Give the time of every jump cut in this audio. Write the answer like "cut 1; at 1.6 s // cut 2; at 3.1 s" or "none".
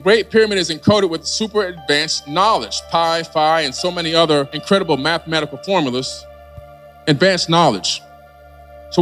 none